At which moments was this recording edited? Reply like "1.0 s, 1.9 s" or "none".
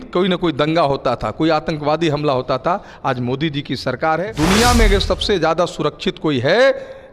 4.2 s